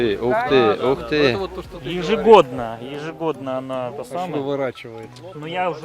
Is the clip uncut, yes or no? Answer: yes